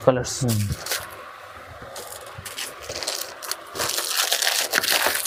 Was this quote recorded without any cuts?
yes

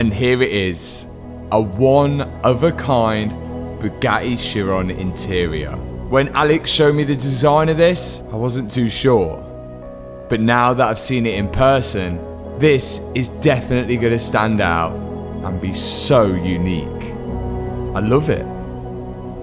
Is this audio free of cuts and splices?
yes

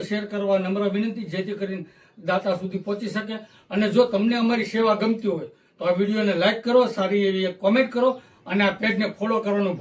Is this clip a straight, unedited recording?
yes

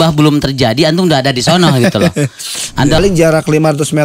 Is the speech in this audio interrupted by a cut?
yes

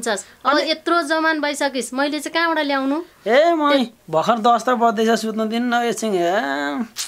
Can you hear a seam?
no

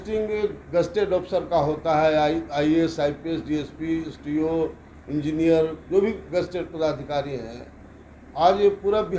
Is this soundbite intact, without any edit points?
yes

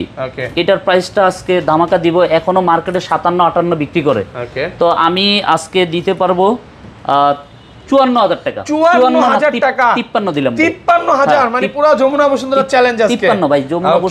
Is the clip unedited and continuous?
yes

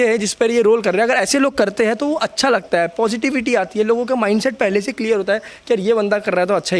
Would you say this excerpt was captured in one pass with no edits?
yes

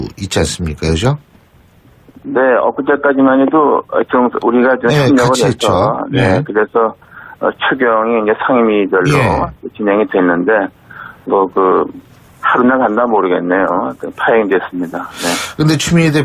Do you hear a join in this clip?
no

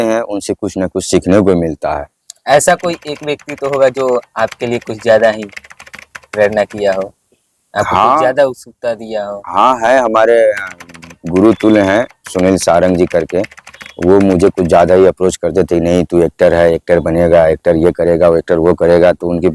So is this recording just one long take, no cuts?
yes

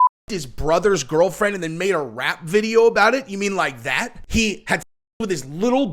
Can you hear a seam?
yes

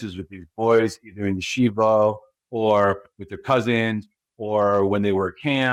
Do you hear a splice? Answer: no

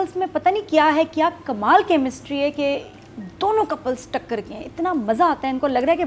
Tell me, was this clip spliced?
no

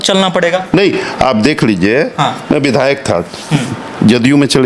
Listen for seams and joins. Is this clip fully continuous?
yes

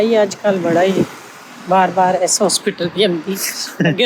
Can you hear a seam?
no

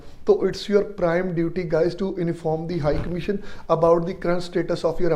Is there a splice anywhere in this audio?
no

